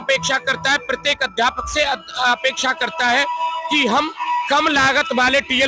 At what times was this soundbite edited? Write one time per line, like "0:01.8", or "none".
none